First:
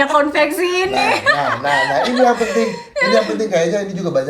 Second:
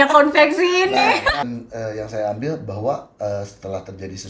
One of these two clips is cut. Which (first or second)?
second